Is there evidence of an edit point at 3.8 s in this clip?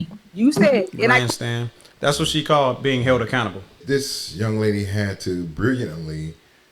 yes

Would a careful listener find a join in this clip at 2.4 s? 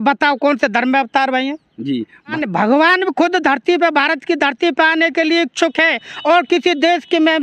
yes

